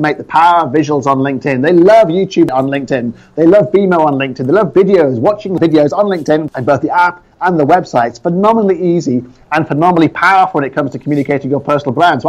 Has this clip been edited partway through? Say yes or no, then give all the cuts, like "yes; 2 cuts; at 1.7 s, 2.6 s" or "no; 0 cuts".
yes; 3 cuts; at 2.5 s, 5.6 s, 6.5 s